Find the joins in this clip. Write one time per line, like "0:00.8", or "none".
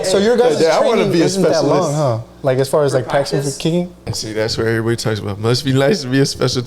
0:04.0